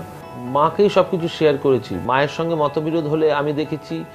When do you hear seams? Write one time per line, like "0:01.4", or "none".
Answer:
0:02.0

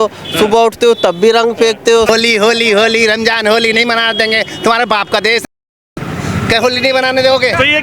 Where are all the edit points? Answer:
0:02.1

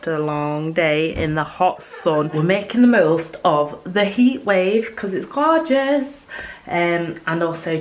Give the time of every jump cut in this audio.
0:02.3

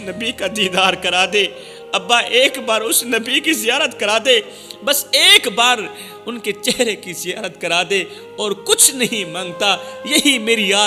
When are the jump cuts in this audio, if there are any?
none

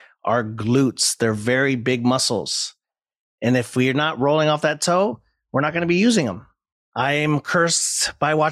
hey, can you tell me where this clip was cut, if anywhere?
none

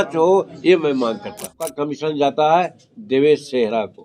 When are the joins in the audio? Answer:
0:01.5

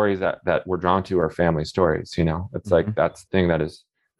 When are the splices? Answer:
0:03.2

